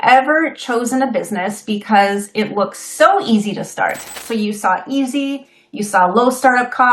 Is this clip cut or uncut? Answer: cut